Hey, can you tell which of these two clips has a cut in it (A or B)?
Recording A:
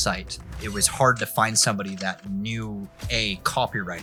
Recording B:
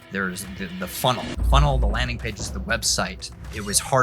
B